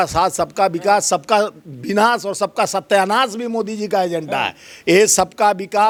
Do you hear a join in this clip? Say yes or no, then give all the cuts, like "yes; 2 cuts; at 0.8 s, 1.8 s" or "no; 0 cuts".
no; 0 cuts